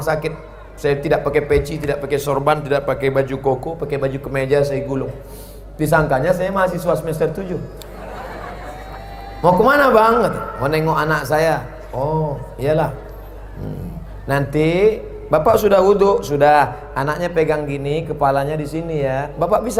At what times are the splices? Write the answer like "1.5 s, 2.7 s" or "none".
none